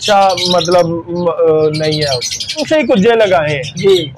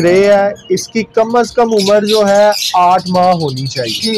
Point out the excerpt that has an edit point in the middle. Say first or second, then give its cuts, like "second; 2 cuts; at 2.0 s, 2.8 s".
first; 1 cut; at 2.7 s